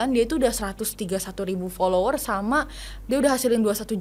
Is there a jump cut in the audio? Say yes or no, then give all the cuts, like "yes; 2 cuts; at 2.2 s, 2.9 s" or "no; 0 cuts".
no; 0 cuts